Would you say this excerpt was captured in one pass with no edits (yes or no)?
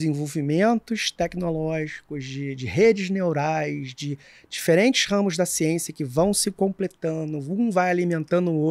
yes